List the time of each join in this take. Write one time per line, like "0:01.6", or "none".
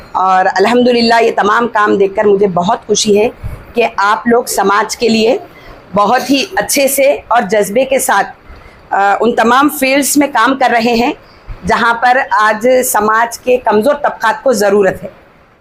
none